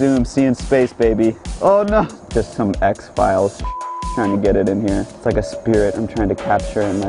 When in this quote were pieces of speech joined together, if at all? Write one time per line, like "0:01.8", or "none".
0:01.5
0:02.2
0:05.1